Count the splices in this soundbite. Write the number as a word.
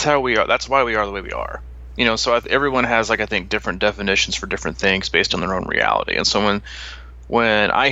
zero